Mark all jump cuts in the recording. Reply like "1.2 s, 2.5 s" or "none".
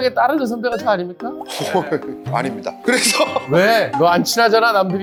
none

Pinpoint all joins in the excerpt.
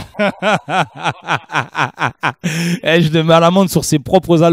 none

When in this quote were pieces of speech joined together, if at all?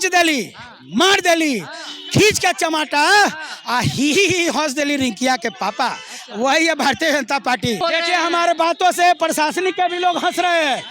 7.8 s

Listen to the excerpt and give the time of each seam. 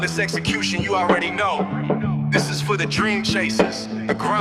none

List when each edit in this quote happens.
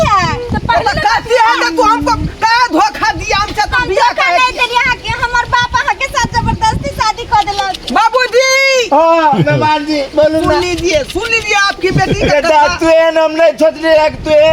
none

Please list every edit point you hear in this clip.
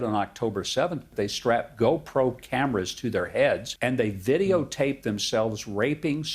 1.1 s, 3.7 s

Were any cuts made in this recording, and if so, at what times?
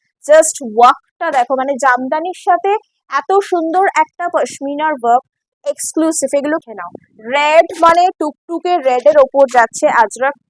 6.7 s

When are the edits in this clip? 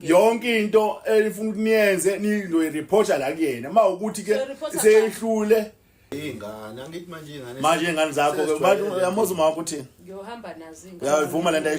6.2 s

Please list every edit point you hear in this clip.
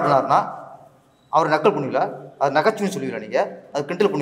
none

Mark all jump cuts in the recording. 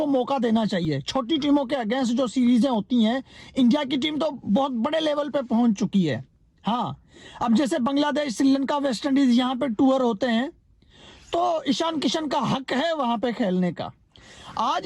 none

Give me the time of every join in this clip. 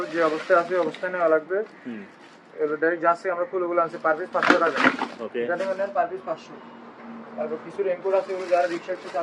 none

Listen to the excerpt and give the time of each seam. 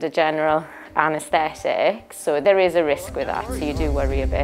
none

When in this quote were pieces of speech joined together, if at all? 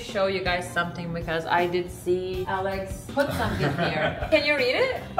2.7 s, 4.3 s

